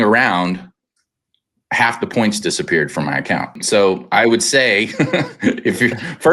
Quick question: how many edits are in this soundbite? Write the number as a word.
one